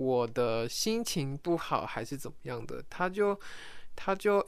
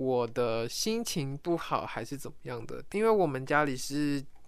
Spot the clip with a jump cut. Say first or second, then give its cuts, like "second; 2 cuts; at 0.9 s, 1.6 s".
second; 1 cut; at 2.9 s